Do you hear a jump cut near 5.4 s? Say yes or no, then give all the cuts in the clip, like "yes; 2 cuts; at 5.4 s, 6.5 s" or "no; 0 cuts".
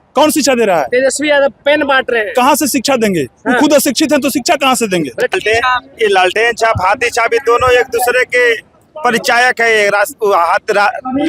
yes; 1 cut; at 5.4 s